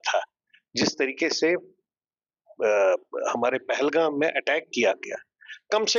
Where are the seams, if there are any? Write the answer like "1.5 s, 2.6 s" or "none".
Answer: none